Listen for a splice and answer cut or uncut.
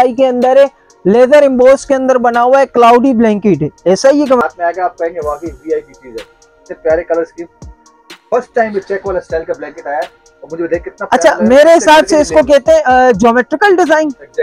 cut